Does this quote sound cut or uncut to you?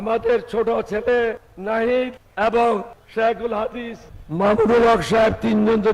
cut